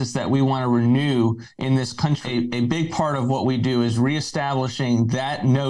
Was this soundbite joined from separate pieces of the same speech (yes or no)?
yes